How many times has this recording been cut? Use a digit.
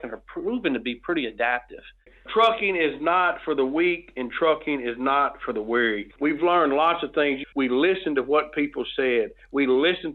3